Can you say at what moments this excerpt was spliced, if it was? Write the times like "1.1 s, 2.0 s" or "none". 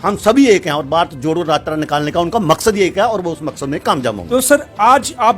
4.2 s